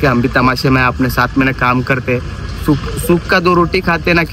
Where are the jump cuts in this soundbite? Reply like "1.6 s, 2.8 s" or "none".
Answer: none